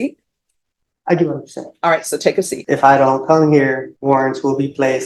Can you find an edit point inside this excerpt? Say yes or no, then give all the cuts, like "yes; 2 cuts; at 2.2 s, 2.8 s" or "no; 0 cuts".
yes; 2 cuts; at 2.6 s, 3.9 s